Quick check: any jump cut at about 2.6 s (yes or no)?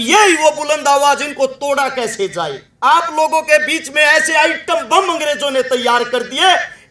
yes